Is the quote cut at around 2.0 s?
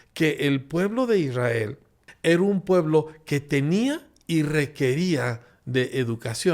yes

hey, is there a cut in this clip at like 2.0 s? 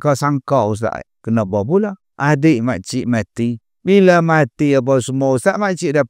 yes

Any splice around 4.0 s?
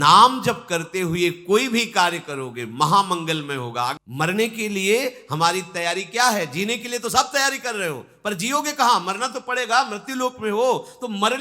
yes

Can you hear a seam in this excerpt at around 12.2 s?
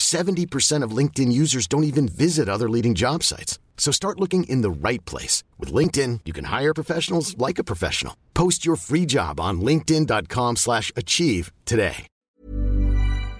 yes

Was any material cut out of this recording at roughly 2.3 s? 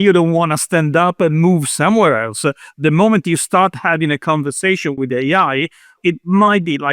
no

